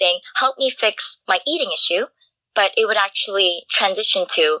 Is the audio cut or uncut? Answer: uncut